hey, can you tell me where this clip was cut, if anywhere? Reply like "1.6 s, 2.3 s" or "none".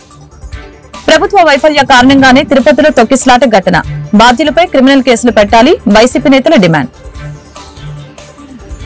1.0 s